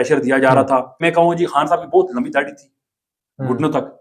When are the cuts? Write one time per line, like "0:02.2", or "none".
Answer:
0:01.0